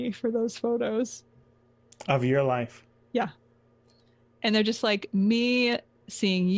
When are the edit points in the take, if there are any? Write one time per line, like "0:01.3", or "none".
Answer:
none